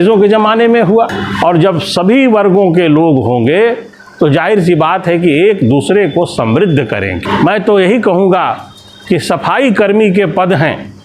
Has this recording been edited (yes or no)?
yes